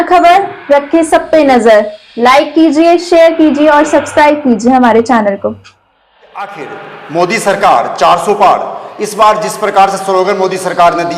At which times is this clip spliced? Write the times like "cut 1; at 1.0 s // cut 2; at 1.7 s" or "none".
cut 1; at 5.9 s